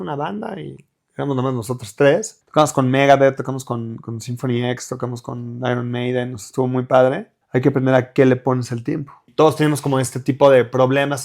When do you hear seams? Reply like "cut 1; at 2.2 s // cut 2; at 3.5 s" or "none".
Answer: cut 1; at 2.4 s // cut 2; at 7.3 s // cut 3; at 9.3 s